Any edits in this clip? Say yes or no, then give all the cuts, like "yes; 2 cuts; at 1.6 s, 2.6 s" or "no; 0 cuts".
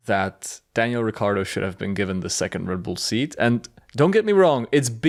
no; 0 cuts